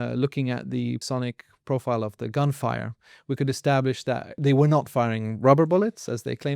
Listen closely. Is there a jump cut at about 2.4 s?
no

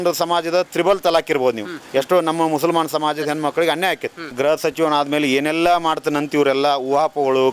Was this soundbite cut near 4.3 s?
yes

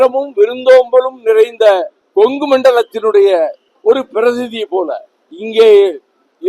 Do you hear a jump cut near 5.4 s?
no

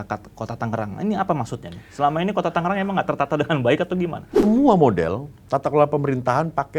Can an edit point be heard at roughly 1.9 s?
no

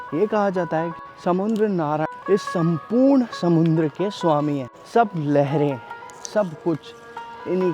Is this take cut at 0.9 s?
yes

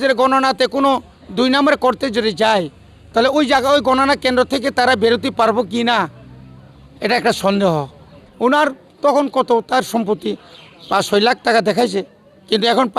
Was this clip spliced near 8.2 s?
yes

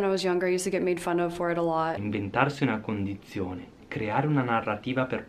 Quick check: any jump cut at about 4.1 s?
no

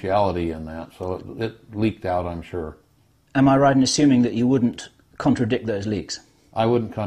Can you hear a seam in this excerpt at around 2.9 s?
yes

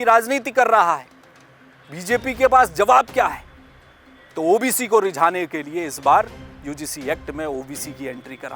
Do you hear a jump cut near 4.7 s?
no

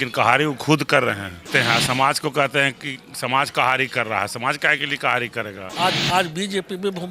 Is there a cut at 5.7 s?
yes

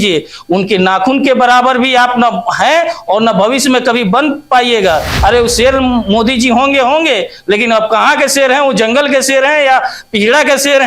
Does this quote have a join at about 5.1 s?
yes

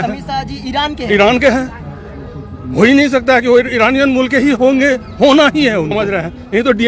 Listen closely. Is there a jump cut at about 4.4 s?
no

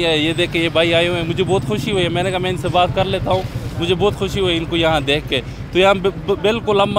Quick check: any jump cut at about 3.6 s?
no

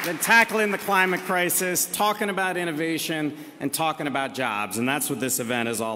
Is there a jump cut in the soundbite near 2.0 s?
yes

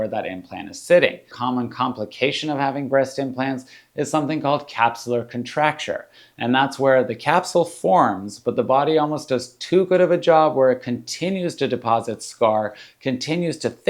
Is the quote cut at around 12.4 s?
no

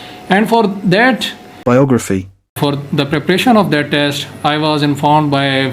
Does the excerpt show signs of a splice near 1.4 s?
yes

